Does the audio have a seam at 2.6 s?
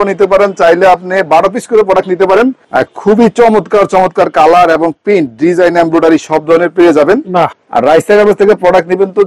yes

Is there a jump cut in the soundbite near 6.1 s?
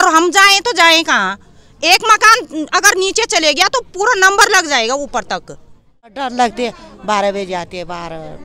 yes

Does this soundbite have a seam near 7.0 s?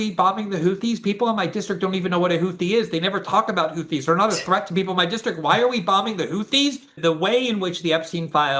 yes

